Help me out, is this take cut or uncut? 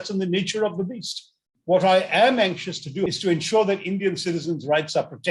cut